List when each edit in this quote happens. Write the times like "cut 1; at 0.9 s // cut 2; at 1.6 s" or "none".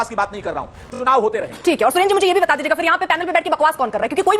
cut 1; at 0.9 s